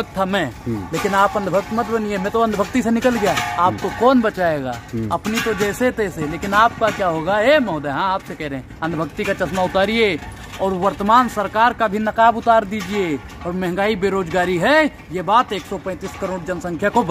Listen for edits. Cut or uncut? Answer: uncut